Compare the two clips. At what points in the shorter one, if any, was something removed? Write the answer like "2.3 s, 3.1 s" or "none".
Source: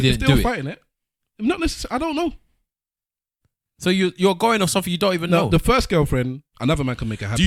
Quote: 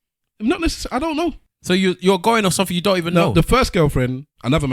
1.5 s